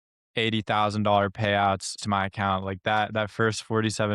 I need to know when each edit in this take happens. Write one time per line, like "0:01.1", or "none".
0:01.9